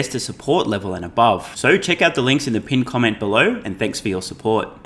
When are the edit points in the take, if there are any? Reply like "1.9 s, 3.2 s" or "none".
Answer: none